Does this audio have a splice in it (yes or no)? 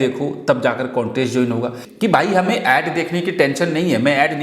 yes